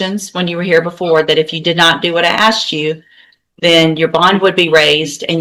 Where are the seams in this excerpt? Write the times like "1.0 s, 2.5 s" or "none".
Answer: none